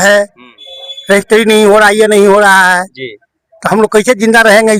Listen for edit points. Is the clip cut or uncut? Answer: uncut